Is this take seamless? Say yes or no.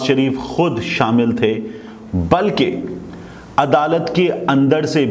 yes